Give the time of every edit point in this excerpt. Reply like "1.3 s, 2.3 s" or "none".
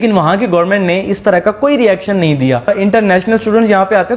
2.7 s